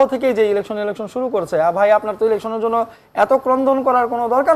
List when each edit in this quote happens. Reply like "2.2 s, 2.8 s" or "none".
none